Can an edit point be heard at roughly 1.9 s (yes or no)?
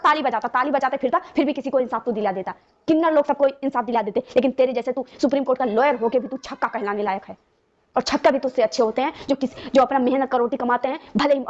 no